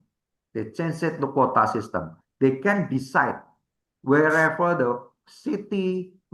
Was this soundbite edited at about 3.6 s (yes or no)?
no